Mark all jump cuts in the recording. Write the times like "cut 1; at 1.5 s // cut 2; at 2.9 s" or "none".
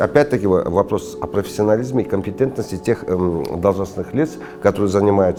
none